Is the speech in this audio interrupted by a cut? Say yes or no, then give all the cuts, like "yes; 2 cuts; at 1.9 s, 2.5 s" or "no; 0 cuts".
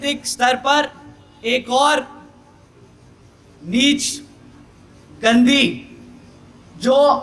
no; 0 cuts